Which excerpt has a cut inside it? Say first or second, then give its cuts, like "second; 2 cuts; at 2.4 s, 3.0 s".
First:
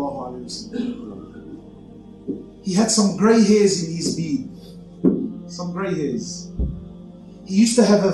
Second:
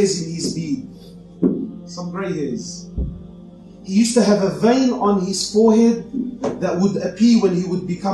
first; 1 cut; at 1.7 s